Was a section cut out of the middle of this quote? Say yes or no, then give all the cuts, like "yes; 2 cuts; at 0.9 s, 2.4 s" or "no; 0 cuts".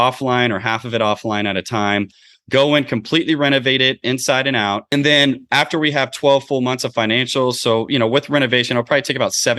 yes; 1 cut; at 4.8 s